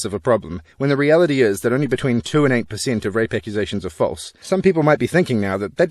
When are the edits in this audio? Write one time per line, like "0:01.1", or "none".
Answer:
0:04.3

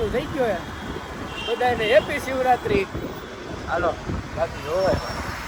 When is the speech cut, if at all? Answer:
none

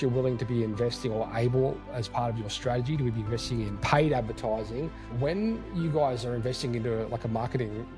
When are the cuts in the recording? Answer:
0:01.9
0:03.8
0:05.0

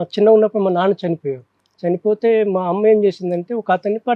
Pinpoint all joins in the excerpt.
none

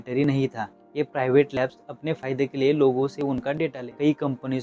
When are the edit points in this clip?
0:03.7

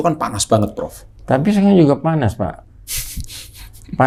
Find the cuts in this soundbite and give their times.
none

